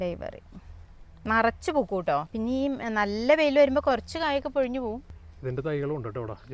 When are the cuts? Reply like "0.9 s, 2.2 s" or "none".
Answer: 2.3 s, 5.1 s